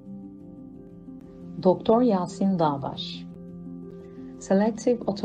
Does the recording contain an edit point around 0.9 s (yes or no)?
yes